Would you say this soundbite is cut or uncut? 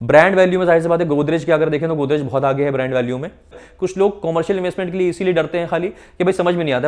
cut